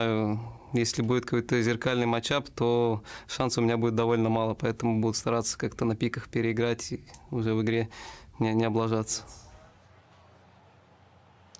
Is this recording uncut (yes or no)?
no